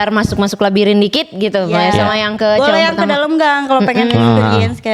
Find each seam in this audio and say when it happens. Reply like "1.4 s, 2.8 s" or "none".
none